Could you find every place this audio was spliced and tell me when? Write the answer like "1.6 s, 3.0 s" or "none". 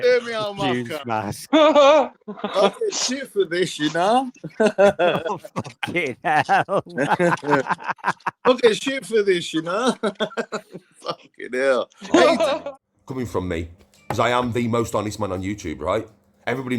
12.6 s